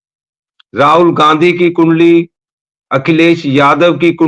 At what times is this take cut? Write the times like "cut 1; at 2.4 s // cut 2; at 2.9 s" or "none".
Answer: none